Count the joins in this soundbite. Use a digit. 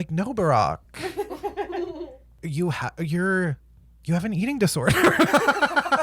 1